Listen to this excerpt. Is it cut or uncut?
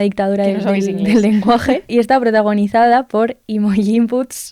cut